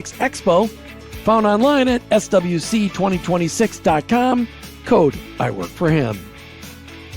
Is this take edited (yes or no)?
yes